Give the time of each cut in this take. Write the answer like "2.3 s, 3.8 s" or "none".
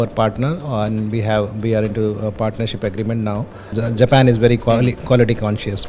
3.7 s